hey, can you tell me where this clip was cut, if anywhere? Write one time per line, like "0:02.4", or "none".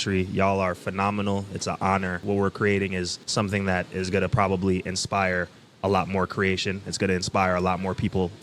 0:02.2
0:03.2